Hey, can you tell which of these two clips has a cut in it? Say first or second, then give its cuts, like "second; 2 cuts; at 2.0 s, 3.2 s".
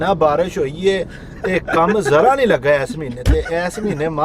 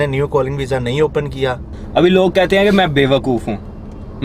second; 1 cut; at 1.7 s